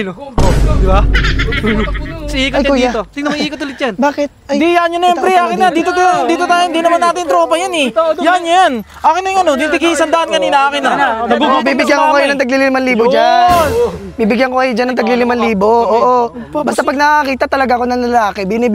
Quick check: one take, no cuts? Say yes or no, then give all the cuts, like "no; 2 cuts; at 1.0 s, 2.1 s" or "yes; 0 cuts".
yes; 0 cuts